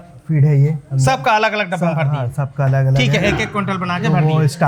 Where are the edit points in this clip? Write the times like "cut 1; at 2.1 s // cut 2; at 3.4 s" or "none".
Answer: none